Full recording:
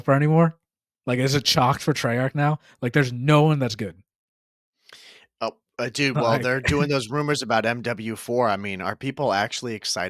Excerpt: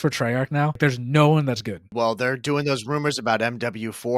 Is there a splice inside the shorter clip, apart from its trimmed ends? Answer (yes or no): yes